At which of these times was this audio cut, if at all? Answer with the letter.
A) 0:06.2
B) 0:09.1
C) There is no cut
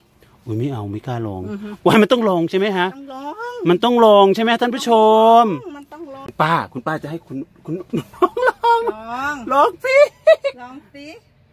A